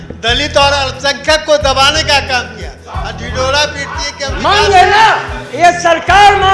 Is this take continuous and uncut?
yes; 0 cuts

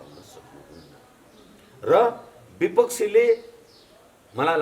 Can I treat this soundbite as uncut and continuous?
yes; 0 cuts

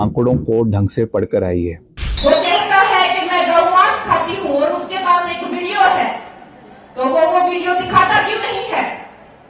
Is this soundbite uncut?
no; 1 cut; at 1.9 s

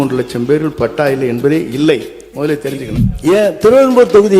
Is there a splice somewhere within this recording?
yes; 1 cut; at 3.0 s

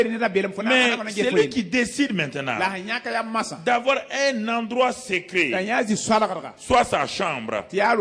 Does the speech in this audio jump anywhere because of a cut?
no; 0 cuts

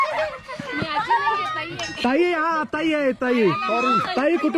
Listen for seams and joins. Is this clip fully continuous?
yes; 0 cuts

